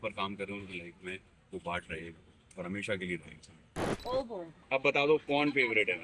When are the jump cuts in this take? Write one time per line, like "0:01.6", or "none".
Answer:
0:03.9